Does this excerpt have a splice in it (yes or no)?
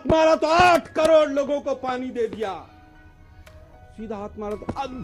no